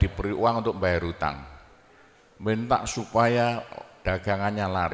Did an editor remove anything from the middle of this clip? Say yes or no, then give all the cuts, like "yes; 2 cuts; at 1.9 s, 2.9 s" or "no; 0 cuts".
no; 0 cuts